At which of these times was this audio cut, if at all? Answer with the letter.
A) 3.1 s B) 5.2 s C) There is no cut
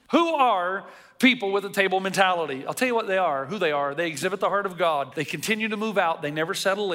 B